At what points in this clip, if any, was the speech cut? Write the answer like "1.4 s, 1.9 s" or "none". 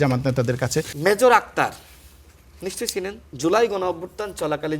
0.9 s, 3.2 s